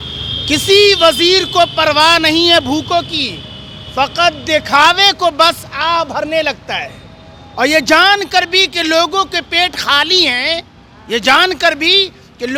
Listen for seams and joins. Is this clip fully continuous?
yes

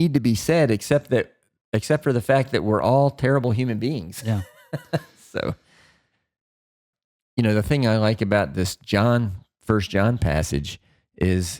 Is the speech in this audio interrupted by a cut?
yes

